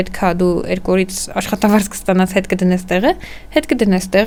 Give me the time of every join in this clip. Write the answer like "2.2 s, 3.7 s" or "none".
none